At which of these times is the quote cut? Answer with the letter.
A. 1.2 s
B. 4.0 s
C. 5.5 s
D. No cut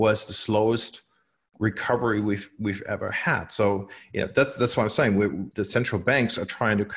C